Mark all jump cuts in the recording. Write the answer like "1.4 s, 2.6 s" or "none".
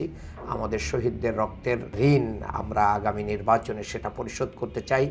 1.9 s

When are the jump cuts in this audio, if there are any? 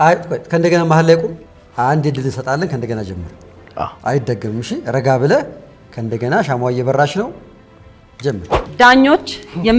1.5 s, 8.7 s

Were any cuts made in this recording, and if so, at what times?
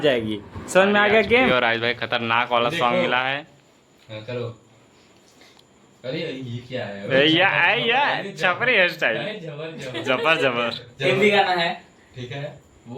1.5 s

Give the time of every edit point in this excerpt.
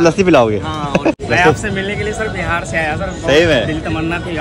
1.2 s

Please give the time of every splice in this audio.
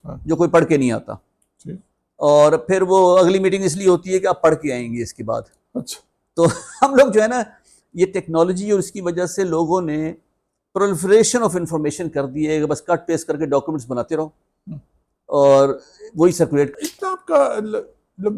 16.7 s

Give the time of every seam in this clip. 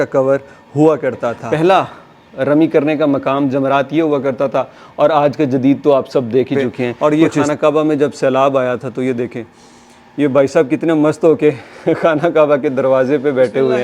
1.4 s, 7.0 s

